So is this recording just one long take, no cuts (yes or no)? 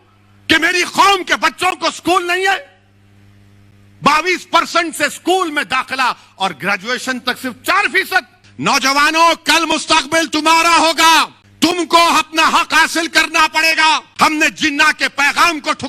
no